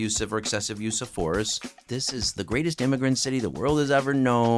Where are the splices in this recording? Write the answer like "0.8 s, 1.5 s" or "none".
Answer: 1.8 s